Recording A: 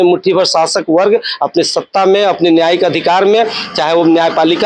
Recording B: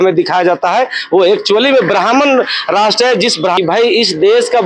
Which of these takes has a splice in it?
B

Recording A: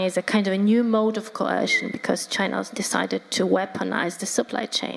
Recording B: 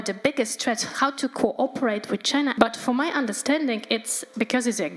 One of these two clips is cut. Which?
B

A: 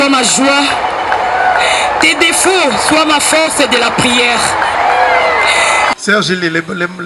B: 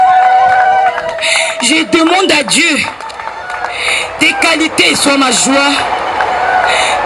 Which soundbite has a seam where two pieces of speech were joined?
A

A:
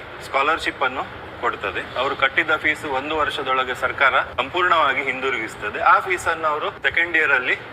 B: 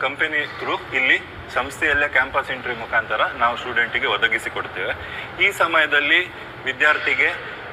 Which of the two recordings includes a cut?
A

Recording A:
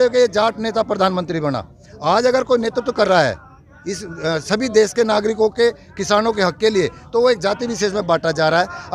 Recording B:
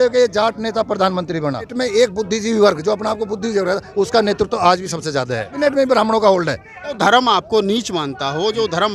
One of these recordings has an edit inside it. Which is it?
B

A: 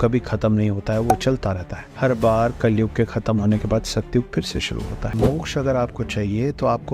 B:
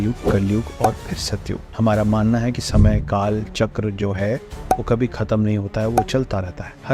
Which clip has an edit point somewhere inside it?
A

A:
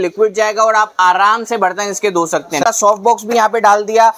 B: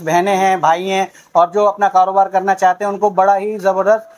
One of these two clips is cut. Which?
A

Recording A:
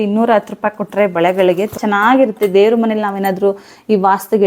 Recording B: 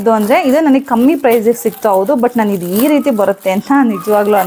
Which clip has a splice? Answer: A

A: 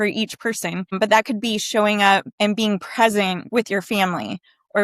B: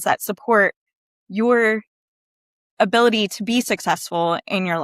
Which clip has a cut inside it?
A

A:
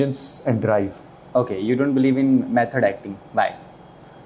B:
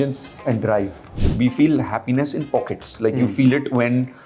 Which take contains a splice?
B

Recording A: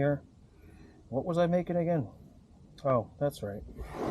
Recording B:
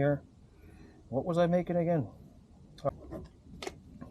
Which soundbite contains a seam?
B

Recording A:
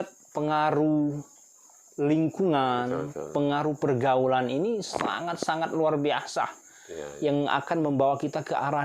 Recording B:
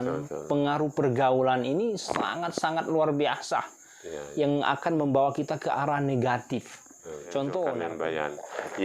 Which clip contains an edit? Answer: B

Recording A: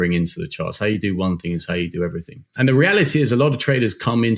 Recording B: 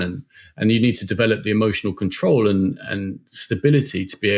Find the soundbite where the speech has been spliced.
A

